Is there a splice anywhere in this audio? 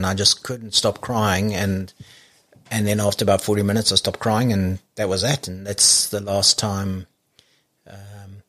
no; 0 cuts

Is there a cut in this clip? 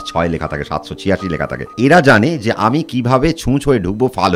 yes; 1 cut; at 1.7 s

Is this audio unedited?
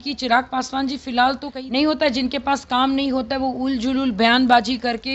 no; 1 cut; at 1.5 s

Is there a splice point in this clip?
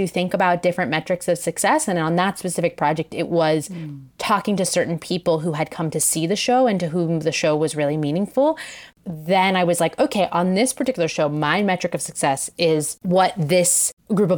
no; 0 cuts

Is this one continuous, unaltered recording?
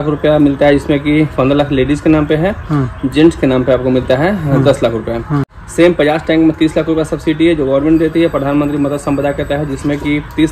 yes; 0 cuts

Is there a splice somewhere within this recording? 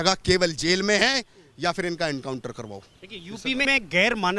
no; 0 cuts

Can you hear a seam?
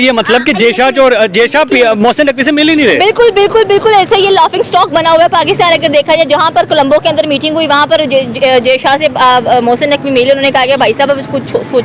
no; 0 cuts

